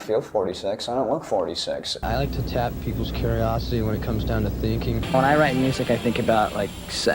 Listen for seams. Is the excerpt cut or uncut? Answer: cut